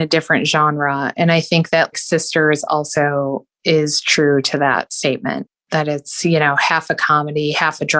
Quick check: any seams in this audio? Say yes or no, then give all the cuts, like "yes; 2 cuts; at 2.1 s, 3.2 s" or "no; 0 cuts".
yes; 1 cut; at 1.9 s